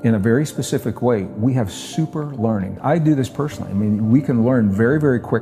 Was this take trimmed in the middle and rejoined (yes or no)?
yes